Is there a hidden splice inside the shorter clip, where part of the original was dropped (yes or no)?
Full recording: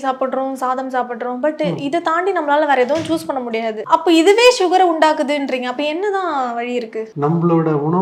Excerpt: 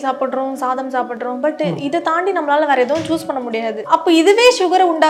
no